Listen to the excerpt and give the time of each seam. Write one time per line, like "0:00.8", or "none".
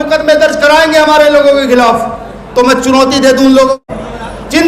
0:03.8